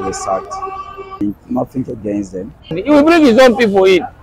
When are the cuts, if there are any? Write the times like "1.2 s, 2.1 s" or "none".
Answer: 1.2 s, 2.8 s